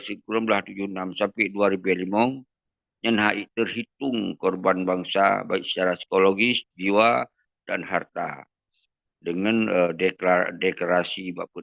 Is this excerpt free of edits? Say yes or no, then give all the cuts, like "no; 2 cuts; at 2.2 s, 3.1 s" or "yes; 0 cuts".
yes; 0 cuts